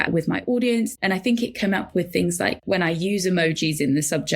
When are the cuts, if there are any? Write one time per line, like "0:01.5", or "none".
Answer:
0:01.0
0:02.6

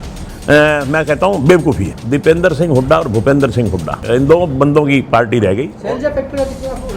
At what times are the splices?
0:02.0
0:04.0
0:05.7

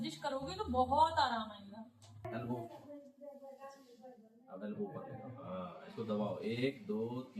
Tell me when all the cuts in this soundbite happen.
0:02.2

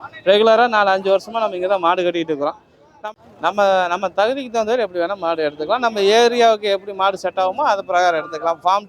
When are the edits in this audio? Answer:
0:03.0

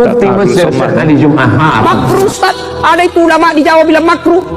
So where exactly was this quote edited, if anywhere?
0:02.0

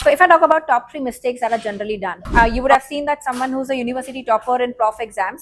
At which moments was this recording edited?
0:02.2

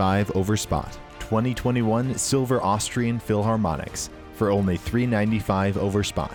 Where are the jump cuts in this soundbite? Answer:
none

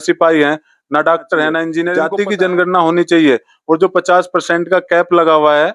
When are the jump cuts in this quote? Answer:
0:01.9

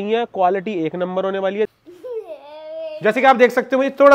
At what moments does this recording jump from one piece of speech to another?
0:01.7

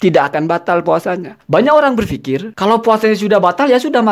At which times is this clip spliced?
0:01.3
0:02.5

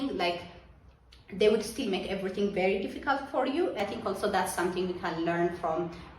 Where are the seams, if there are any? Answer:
0:03.8

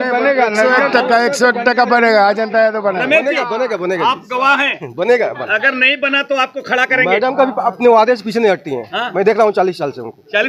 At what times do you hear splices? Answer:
none

